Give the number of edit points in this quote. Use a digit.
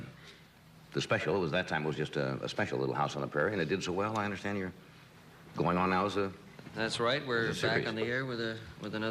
1